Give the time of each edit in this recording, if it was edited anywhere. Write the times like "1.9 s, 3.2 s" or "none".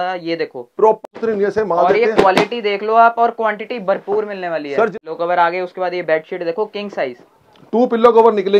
1.0 s, 5.0 s